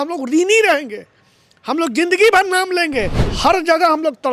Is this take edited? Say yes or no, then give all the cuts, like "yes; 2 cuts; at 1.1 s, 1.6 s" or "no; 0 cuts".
yes; 1 cut; at 3.2 s